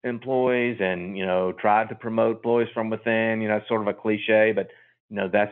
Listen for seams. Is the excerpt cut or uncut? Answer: uncut